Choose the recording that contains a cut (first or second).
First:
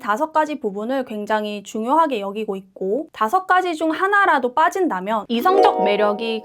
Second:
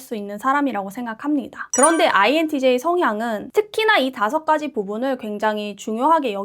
second